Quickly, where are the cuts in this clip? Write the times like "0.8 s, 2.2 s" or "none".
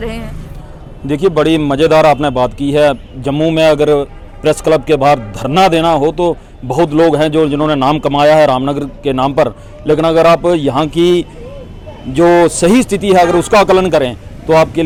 none